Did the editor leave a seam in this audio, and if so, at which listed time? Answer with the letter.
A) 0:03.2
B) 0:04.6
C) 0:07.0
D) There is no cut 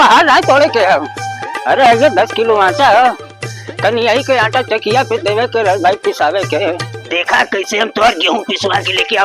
C